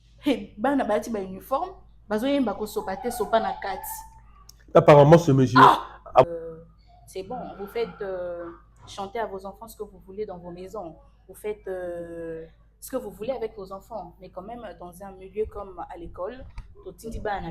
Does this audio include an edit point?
yes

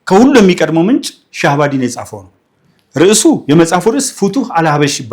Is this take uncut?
yes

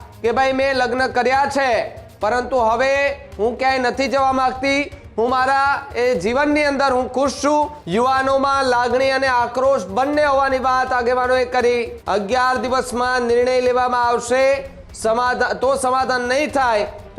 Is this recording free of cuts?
no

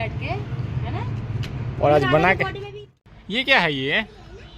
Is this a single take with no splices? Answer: no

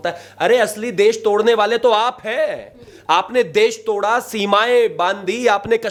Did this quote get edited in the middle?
no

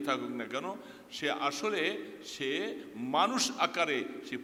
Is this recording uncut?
yes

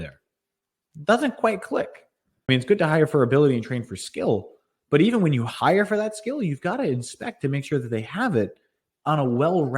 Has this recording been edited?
yes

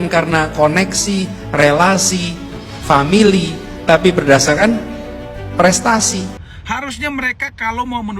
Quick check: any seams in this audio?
yes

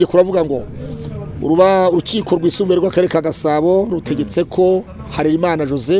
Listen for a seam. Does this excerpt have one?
no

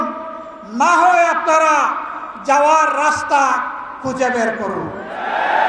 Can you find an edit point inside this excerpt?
no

